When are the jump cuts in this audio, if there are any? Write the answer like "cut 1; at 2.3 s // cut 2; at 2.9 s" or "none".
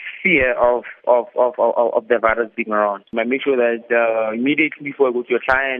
cut 1; at 3.0 s